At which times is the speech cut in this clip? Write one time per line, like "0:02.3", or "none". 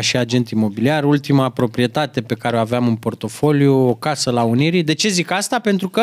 none